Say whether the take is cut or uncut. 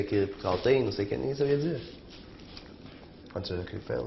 cut